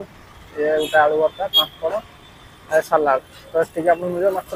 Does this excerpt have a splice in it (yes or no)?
no